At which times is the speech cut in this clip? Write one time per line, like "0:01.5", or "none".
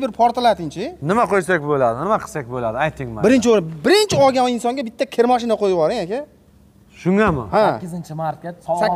none